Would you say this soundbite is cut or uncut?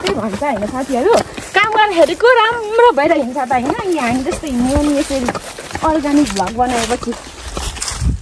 uncut